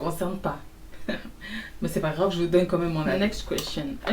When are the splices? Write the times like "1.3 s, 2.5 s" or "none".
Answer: 3.2 s